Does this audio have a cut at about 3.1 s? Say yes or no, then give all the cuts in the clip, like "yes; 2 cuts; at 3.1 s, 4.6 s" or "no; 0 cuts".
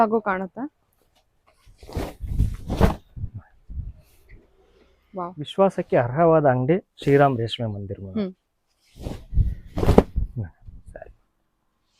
no; 1 cut; at 5.4 s